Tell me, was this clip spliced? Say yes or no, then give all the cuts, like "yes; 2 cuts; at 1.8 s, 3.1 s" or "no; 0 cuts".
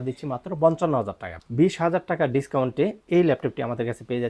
no; 0 cuts